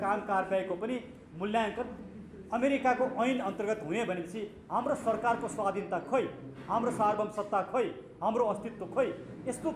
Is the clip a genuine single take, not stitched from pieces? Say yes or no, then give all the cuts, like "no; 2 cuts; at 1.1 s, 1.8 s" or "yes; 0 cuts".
yes; 0 cuts